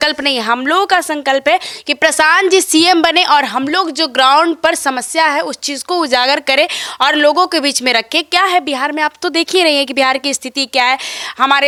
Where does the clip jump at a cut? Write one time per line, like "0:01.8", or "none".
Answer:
none

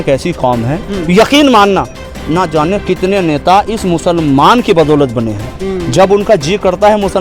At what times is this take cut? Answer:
none

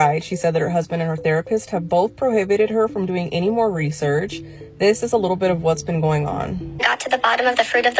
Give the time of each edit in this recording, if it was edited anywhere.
none

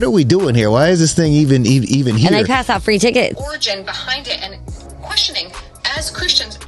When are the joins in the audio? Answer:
0:03.3

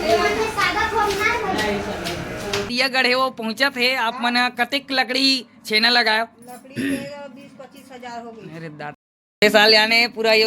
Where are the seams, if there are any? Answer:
0:02.7
0:09.2

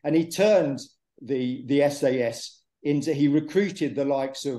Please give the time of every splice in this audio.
none

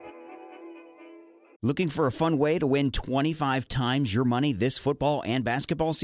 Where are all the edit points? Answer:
0:01.0

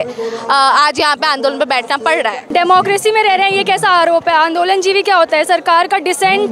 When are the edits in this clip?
none

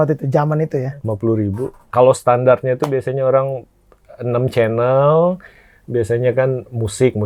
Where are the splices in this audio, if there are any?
0:01.9

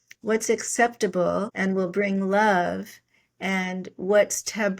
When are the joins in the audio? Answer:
0:01.5

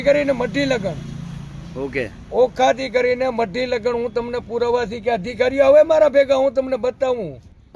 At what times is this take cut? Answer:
none

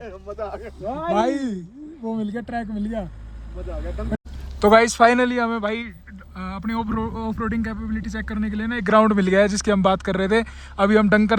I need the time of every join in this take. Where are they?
none

